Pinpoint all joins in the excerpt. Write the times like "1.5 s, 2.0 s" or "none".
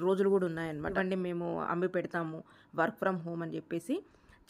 1.0 s